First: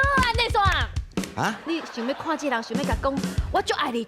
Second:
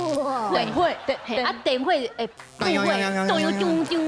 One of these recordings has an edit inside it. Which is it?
first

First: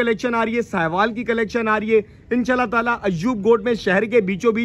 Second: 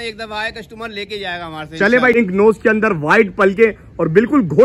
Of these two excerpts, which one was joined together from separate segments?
second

